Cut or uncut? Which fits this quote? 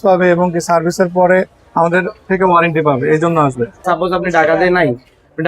cut